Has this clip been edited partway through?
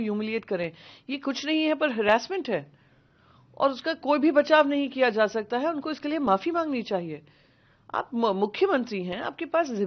no; 0 cuts

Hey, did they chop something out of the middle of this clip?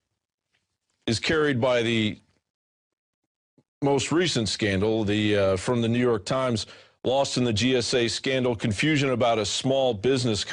yes; 1 cut; at 1.4 s

